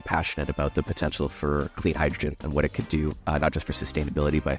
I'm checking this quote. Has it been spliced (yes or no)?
yes